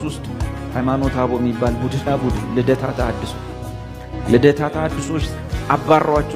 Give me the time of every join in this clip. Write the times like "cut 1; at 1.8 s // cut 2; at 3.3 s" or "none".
cut 1; at 2.1 s

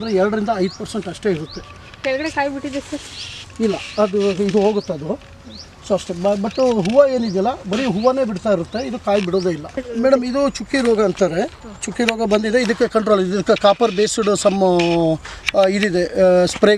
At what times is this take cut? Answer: cut 1; at 9.9 s

